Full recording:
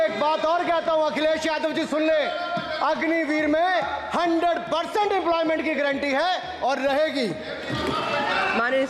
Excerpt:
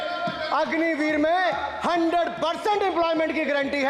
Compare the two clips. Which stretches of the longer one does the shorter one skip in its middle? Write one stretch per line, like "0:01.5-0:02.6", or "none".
none